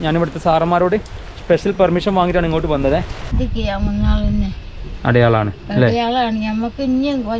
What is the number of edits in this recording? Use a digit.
1